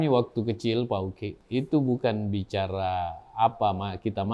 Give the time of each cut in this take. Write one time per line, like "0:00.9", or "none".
0:01.4